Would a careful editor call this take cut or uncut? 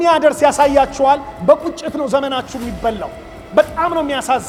uncut